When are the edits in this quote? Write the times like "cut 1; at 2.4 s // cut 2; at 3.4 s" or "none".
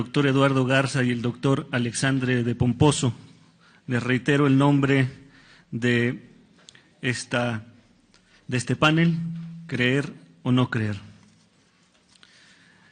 cut 1; at 4.0 s